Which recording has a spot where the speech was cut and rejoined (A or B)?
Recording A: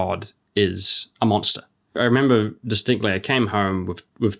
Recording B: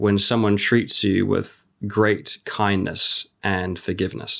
A